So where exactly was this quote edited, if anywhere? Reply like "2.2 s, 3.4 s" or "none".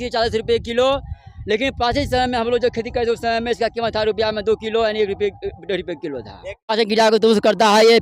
6.6 s